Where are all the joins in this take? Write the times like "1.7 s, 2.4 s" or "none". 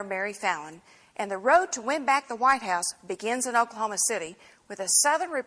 2.0 s